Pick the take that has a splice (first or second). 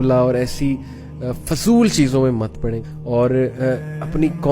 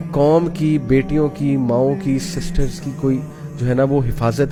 first